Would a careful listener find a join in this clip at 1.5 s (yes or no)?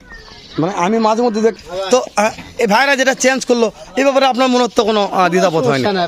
yes